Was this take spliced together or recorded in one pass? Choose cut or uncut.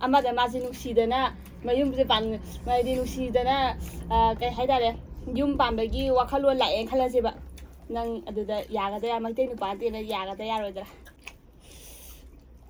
uncut